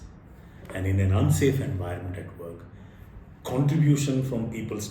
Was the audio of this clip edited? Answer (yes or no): no